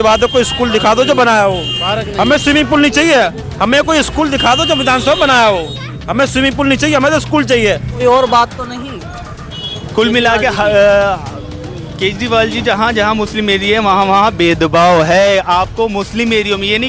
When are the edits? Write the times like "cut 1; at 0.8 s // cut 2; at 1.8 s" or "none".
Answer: cut 1; at 8.0 s